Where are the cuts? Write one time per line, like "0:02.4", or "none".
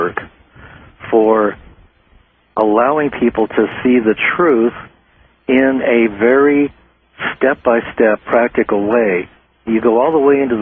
0:03.5